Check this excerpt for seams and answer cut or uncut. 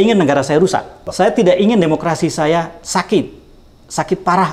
cut